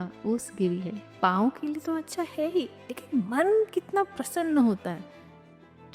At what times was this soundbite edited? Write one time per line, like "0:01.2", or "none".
0:01.1